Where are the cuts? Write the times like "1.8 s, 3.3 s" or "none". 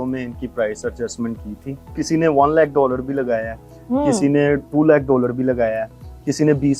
2.0 s